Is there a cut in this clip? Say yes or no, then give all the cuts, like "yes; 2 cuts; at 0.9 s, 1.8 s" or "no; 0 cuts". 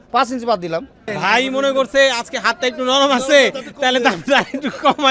yes; 1 cut; at 1.0 s